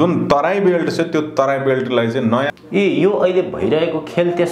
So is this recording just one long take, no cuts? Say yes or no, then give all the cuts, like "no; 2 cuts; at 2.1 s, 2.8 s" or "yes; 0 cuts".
no; 1 cut; at 2.5 s